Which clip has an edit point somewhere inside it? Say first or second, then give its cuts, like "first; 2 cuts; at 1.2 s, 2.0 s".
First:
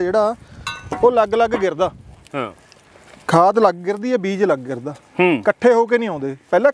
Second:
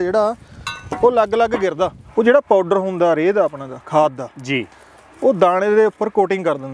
second; 1 cut; at 2.0 s